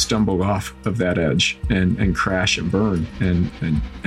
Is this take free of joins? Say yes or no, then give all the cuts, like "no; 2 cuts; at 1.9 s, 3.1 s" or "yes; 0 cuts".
no; 1 cut; at 3.1 s